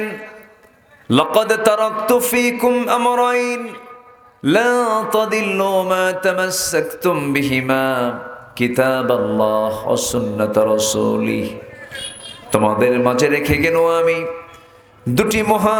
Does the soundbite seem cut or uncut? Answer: uncut